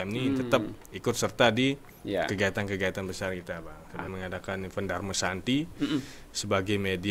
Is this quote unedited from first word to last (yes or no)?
no